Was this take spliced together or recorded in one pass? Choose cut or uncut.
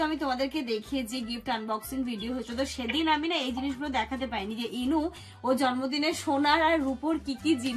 uncut